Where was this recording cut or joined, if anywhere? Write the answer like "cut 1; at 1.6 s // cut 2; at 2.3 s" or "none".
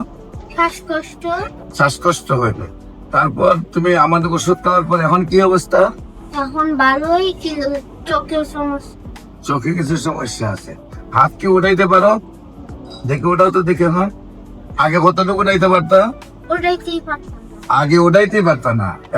cut 1; at 1.6 s